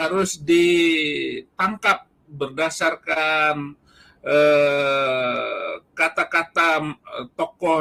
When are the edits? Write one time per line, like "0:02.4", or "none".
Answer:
none